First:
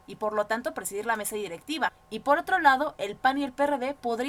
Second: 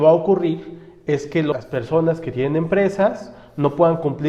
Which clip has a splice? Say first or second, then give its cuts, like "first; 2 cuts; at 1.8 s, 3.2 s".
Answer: second; 1 cut; at 1.5 s